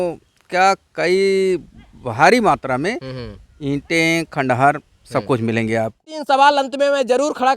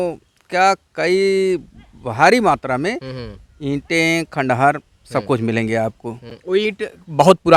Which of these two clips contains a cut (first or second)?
first